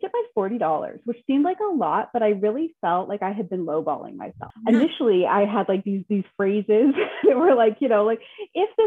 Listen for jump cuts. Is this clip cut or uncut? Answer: cut